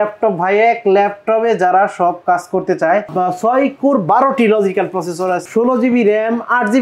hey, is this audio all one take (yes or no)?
no